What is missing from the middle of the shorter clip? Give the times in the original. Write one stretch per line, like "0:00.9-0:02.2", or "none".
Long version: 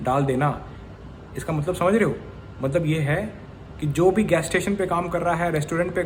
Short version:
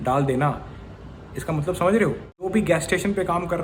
0:02.5-0:04.1